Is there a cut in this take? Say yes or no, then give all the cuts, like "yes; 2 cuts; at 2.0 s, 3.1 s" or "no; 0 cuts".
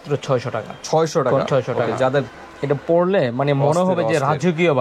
yes; 1 cut; at 2.3 s